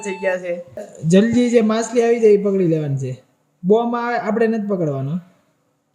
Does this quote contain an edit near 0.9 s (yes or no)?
yes